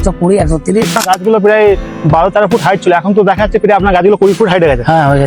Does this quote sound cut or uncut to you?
cut